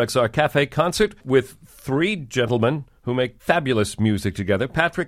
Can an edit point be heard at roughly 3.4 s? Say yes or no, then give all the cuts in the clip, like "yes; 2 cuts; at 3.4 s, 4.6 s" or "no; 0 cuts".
yes; 2 cuts; at 1.2 s, 3.4 s